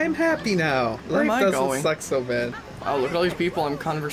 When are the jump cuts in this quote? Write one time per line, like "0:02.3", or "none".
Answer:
0:01.0
0:02.5